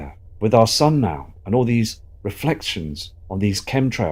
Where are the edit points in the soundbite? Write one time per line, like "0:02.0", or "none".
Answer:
none